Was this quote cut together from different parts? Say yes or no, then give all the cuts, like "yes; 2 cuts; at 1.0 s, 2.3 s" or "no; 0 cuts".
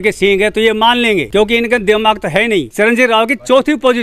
yes; 2 cuts; at 1.3 s, 2.7 s